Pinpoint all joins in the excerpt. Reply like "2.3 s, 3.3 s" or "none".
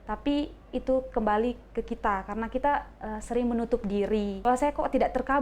4.5 s